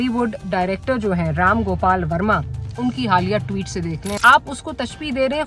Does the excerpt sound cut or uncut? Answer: cut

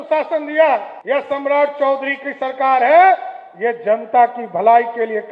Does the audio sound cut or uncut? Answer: cut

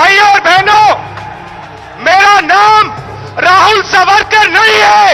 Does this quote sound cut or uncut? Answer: uncut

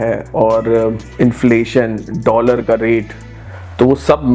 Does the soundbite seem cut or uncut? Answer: cut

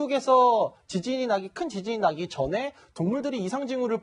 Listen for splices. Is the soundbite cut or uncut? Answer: uncut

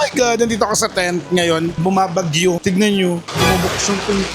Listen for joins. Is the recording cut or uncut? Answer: cut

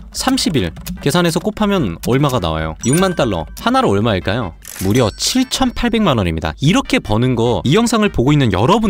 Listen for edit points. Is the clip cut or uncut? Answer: cut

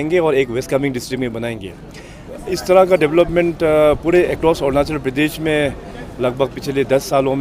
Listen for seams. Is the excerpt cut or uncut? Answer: cut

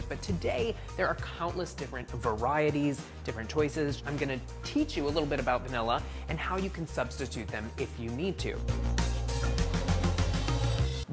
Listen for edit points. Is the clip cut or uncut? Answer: uncut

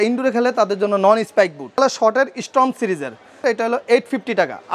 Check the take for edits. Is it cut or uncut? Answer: cut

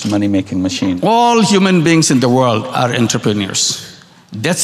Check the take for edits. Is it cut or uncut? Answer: cut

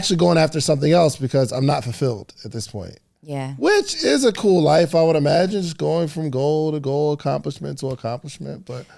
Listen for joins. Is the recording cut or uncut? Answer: uncut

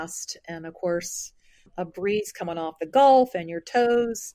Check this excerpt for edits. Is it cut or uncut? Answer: cut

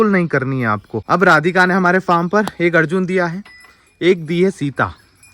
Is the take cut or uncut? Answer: cut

